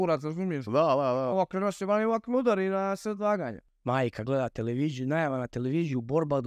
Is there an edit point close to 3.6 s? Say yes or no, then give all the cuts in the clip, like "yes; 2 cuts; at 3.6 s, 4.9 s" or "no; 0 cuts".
yes; 1 cut; at 3.6 s